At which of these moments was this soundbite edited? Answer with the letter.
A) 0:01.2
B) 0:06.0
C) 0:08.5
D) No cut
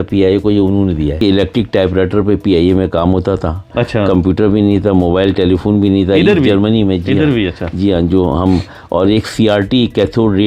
A